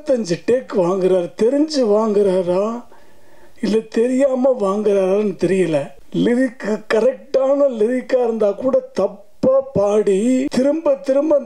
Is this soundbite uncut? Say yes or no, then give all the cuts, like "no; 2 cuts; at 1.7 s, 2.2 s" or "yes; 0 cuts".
no; 2 cuts; at 6.0 s, 10.5 s